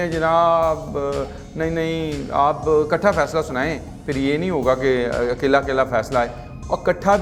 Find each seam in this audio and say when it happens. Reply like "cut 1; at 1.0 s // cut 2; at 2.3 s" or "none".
none